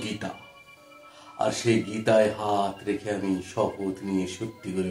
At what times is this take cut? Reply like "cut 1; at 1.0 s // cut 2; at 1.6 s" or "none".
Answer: none